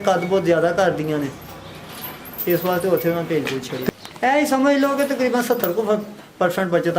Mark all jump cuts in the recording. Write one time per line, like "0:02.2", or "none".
0:03.9